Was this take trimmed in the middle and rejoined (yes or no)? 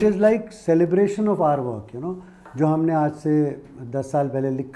no